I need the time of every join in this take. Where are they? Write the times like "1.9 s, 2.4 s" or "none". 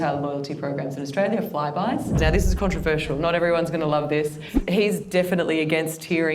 2.2 s, 4.6 s

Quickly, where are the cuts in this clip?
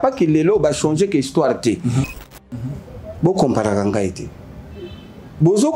2.3 s

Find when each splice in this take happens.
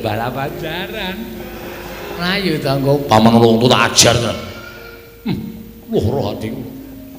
2.2 s

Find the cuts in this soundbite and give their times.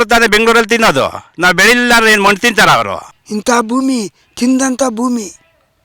3.1 s

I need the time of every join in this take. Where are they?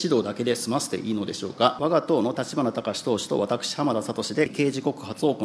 1.8 s, 4.5 s

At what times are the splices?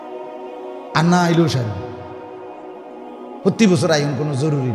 none

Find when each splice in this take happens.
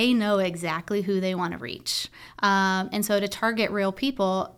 none

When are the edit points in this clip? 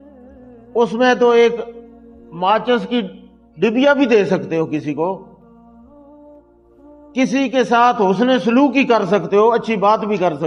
none

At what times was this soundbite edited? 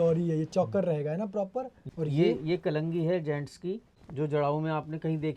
1.8 s, 4.0 s

